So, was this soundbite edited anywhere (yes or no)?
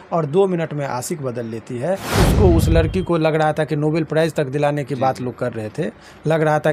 yes